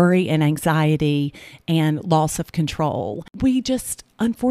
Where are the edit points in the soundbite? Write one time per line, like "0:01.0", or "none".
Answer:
0:03.3

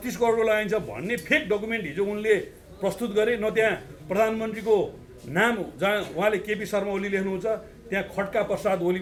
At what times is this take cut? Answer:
none

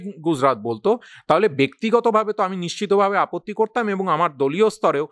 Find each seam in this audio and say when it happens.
none

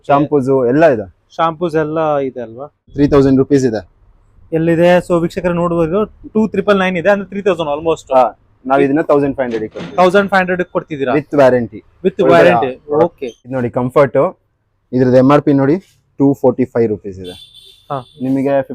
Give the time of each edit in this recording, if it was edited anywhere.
0:02.9
0:13.5

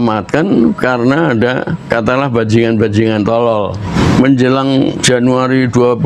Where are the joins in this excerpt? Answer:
0:01.9
0:03.8
0:05.0

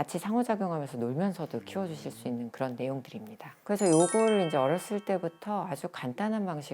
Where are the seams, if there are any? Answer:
0:03.6

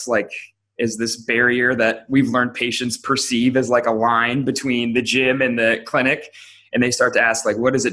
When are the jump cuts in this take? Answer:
none

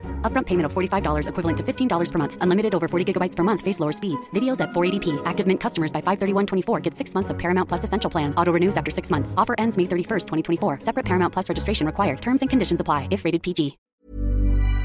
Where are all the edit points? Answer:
0:13.8

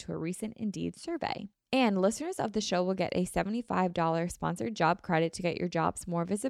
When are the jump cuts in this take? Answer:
0:01.5

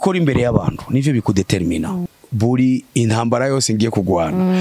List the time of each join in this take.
0:02.1

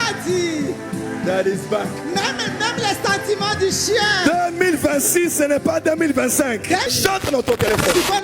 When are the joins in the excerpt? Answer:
0:07.2

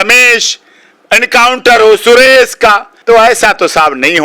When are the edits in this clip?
0:03.0

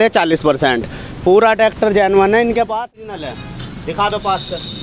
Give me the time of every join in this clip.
0:02.9

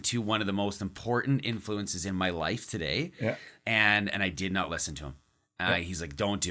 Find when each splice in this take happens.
none

